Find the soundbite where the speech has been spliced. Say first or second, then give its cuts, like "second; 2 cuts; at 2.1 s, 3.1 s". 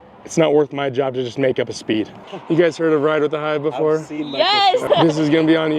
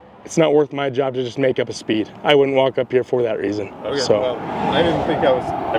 first; 2 cuts; at 2.2 s, 4.9 s